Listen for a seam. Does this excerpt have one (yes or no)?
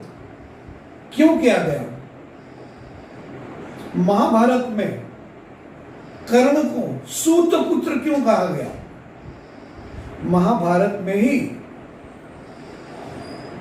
no